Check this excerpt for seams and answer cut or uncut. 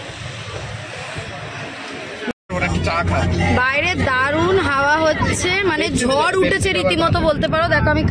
cut